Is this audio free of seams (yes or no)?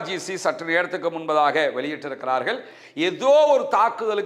no